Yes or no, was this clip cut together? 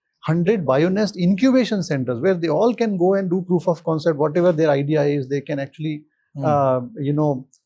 no